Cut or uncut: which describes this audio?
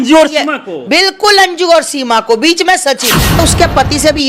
cut